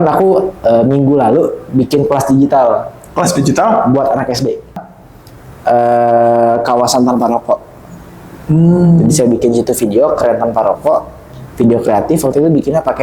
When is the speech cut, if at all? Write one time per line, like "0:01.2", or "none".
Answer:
0:04.9